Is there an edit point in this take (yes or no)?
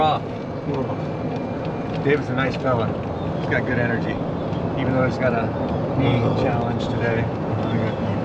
no